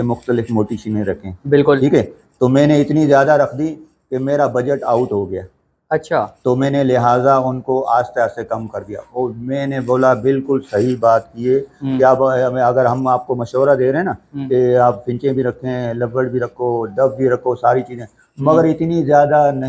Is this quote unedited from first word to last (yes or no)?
yes